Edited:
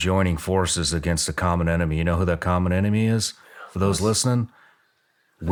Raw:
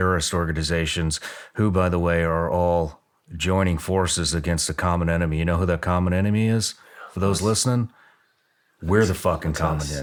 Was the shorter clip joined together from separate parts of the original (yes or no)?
no